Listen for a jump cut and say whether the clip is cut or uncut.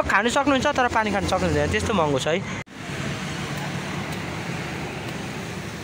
cut